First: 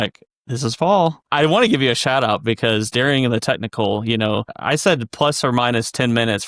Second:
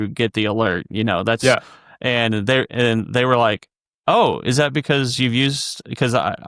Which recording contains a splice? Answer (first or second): first